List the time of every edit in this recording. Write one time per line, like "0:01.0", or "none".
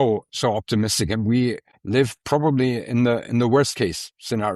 0:01.7